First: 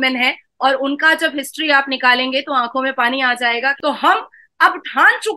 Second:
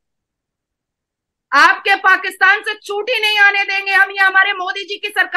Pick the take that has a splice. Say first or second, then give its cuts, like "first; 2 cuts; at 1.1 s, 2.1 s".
first; 1 cut; at 3.8 s